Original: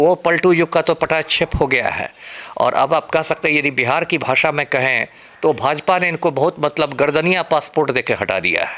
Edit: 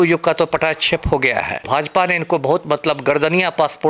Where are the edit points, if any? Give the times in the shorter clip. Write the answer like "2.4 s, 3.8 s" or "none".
1.7 s